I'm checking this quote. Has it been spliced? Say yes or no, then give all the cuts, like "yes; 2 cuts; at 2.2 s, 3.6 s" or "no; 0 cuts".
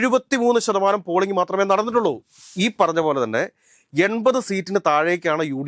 yes; 1 cut; at 2.4 s